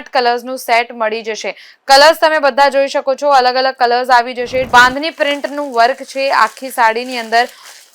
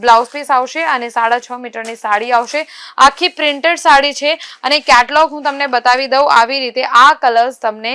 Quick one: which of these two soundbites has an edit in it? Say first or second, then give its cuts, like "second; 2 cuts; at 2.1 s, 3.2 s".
first; 1 cut; at 4.7 s